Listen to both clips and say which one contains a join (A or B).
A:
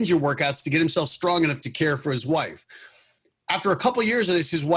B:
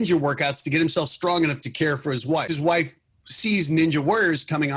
B